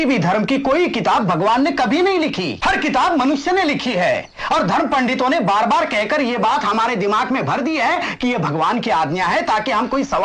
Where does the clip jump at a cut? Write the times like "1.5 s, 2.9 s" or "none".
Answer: 2.5 s

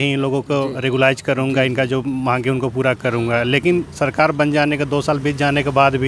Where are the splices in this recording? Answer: none

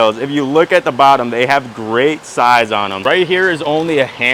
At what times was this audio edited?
3.0 s

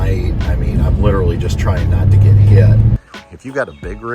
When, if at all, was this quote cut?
3.0 s

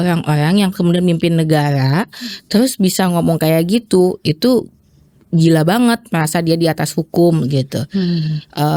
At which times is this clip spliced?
none

